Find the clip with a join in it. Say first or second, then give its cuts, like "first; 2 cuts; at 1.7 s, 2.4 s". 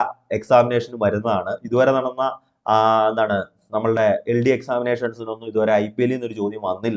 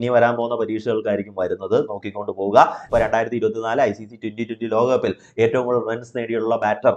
second; 1 cut; at 2.8 s